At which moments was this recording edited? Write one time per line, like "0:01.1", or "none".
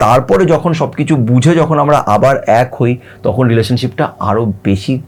none